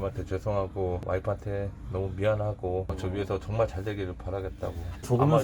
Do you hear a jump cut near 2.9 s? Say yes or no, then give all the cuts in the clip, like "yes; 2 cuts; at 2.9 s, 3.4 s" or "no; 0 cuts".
yes; 1 cut; at 2.9 s